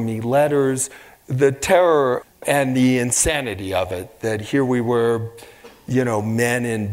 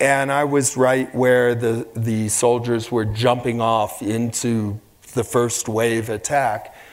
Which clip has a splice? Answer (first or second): first